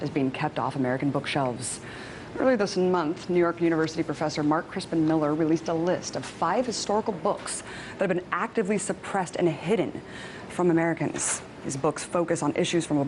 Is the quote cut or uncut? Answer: cut